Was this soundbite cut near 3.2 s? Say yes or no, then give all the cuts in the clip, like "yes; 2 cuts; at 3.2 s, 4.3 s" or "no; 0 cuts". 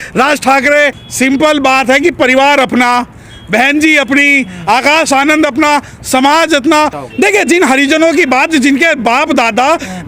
no; 2 cuts; at 1.0 s, 7.0 s